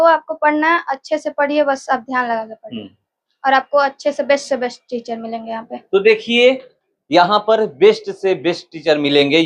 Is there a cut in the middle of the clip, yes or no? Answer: no